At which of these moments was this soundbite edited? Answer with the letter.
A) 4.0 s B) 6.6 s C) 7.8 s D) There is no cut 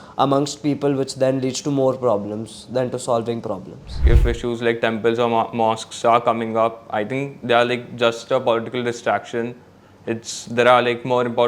A